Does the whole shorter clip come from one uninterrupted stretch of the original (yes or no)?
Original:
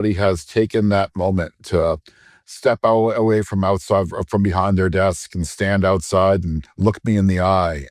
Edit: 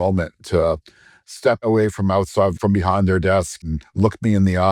no